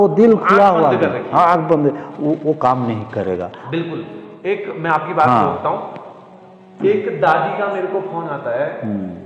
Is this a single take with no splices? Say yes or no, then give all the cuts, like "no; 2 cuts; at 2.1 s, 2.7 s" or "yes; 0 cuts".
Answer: yes; 0 cuts